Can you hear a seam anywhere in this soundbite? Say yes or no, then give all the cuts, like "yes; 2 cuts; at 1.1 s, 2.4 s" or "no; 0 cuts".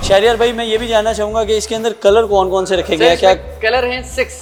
no; 0 cuts